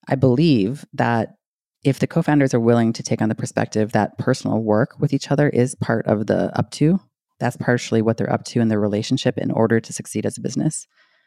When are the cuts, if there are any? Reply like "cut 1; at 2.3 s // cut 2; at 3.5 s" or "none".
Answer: none